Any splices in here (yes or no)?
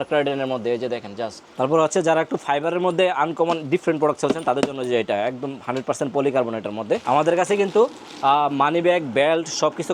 yes